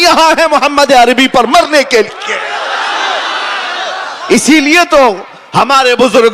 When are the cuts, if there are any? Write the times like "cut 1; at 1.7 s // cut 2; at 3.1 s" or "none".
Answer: none